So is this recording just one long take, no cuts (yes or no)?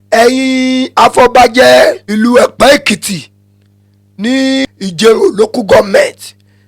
no